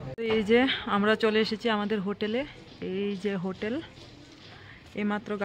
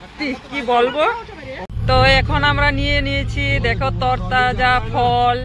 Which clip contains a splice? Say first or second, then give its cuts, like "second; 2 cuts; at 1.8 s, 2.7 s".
second; 1 cut; at 1.7 s